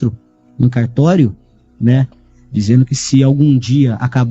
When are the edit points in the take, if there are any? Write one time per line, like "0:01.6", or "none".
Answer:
0:01.5